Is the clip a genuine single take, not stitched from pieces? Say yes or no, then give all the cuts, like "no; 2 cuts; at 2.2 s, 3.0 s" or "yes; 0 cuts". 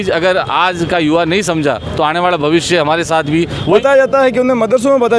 no; 1 cut; at 3.8 s